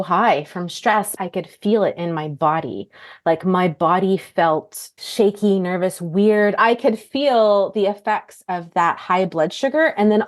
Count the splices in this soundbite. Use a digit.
3